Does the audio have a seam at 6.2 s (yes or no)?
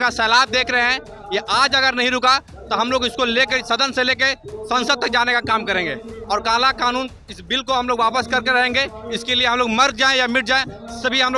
yes